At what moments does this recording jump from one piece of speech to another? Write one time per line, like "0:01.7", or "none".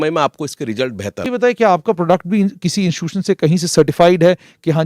0:01.3